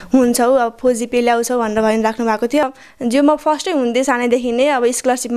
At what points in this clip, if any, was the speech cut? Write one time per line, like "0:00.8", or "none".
0:02.6